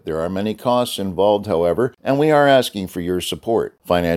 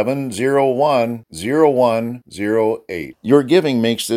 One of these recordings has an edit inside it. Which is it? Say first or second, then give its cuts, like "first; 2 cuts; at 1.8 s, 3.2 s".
first; 1 cut; at 2.0 s